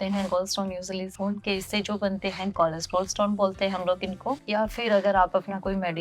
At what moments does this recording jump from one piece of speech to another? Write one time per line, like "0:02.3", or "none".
0:01.1
0:04.4

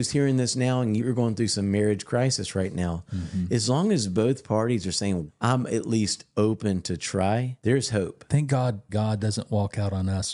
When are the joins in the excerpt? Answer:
0:07.5
0:08.9

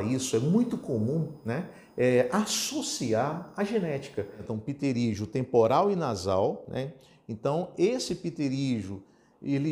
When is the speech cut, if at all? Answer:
0:04.5

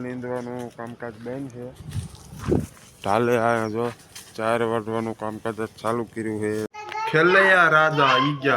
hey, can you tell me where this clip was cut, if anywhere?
0:06.7

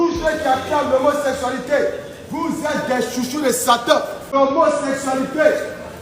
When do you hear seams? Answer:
0:04.2

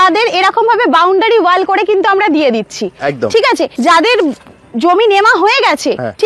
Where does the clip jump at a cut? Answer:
0:03.7

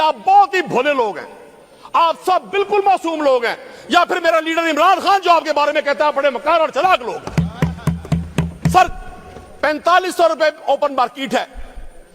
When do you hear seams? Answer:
none

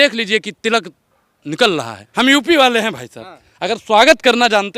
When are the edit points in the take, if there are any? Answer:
0:02.0

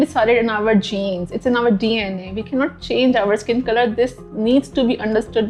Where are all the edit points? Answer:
none

